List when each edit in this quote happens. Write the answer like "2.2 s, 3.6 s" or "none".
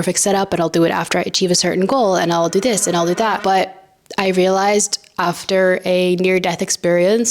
3.4 s